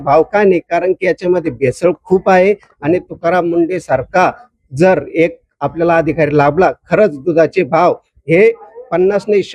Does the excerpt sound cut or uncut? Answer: uncut